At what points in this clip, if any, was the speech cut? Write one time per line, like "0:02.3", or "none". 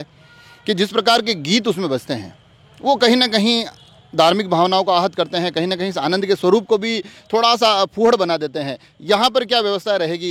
none